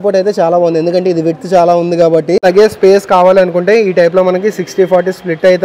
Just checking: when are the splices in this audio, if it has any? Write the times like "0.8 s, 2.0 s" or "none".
2.4 s